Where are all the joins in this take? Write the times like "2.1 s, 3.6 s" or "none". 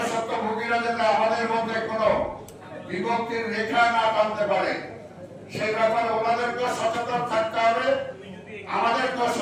none